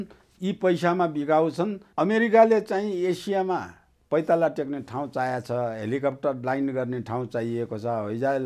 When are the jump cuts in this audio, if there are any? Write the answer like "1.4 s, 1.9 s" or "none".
1.8 s